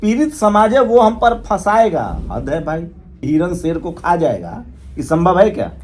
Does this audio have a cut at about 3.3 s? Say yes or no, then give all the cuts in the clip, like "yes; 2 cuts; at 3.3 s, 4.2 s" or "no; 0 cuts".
yes; 1 cut; at 3.3 s